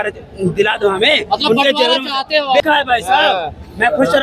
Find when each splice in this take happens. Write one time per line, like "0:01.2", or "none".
0:02.5